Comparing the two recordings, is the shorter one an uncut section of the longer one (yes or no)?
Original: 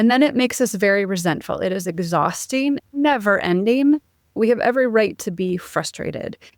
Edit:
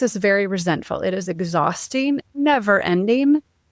yes